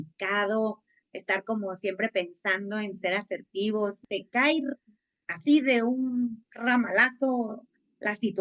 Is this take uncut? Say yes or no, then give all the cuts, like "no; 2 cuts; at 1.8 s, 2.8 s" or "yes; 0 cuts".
no; 1 cut; at 4.0 s